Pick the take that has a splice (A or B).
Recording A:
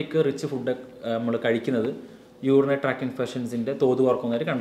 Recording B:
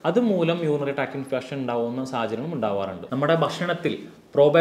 B